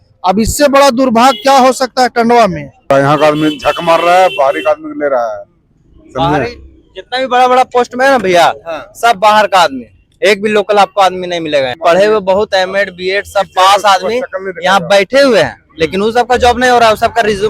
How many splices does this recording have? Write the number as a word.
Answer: two